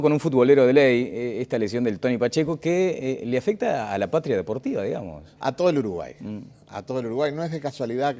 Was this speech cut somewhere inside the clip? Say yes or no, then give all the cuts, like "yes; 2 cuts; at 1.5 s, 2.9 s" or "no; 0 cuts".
no; 0 cuts